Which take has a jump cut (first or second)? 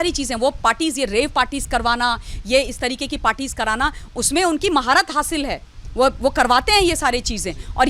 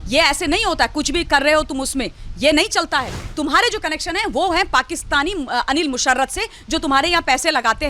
second